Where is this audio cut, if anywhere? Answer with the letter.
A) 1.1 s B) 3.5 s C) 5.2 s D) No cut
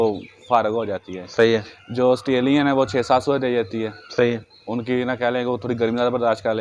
D